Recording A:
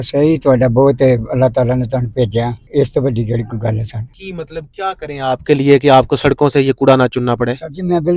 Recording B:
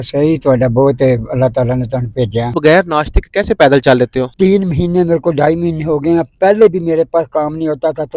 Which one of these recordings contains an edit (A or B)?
B